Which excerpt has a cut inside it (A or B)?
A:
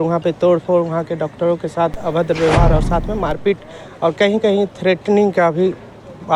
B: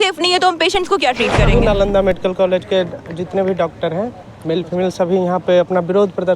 B